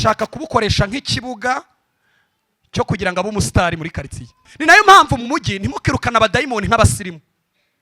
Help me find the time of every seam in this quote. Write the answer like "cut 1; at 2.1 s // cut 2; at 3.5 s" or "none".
cut 1; at 4.5 s